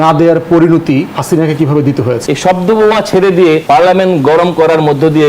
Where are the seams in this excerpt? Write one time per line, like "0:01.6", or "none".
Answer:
0:01.2
0:02.2
0:03.6